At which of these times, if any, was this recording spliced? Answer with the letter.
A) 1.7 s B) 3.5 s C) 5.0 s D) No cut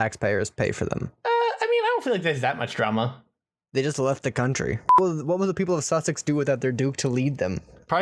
C